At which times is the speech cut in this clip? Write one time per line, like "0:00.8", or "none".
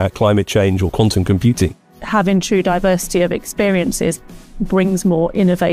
0:01.9